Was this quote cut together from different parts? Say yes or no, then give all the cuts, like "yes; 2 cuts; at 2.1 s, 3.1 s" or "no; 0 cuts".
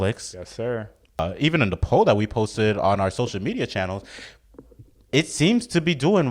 yes; 1 cut; at 1.2 s